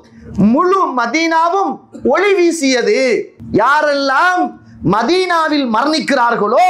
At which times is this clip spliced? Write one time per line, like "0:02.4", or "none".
0:03.4